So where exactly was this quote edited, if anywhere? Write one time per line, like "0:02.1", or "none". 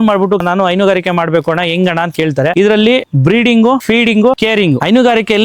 0:02.5